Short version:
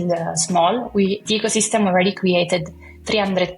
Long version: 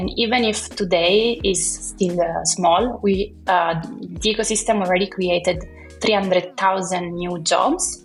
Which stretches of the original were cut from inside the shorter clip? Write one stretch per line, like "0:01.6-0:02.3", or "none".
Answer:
0:03.3-0:04.2